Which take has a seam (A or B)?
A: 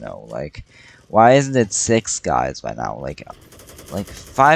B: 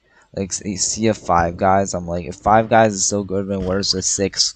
A